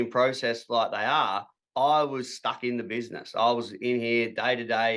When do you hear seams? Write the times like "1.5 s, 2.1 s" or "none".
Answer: none